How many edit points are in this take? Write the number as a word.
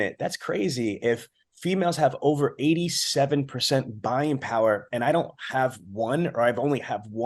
zero